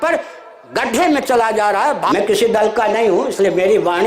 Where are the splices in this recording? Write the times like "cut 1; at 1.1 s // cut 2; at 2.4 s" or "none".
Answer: cut 1; at 2.1 s